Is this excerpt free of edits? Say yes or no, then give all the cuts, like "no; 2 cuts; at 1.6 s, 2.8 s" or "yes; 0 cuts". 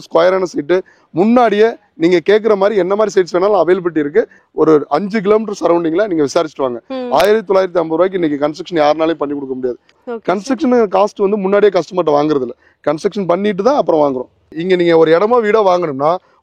no; 3 cuts; at 4.4 s, 10.0 s, 14.5 s